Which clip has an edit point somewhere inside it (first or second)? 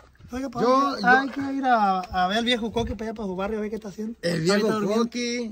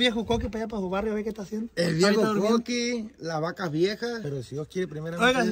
second